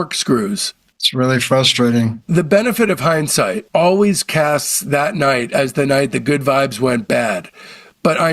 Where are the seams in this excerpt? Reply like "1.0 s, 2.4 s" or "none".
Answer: 2.2 s, 3.6 s